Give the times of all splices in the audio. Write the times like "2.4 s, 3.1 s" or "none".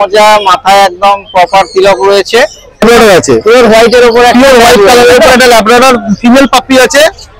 2.8 s

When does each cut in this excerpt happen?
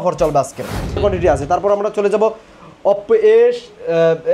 1.0 s

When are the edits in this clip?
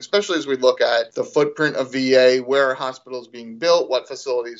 1.2 s

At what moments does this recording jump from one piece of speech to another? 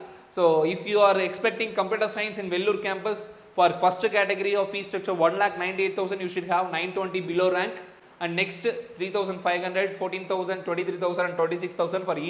none

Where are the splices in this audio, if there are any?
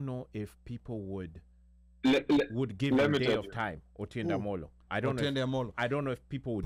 none

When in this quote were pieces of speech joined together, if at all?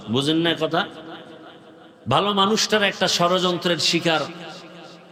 none

